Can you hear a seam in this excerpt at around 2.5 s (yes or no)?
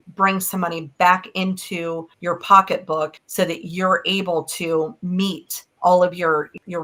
no